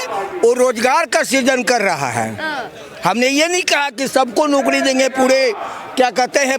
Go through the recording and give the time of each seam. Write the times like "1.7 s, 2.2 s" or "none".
none